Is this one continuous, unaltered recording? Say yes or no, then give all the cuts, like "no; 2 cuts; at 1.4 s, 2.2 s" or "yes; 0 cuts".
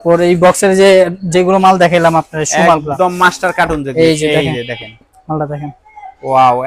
yes; 0 cuts